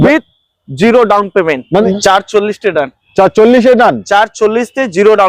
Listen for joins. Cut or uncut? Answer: cut